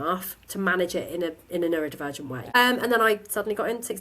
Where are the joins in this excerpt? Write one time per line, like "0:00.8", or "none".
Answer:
0:02.4